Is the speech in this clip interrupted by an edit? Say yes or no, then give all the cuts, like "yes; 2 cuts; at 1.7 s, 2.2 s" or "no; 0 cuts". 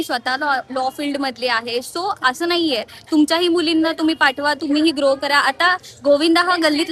no; 0 cuts